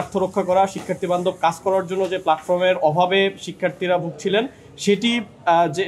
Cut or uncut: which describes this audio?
uncut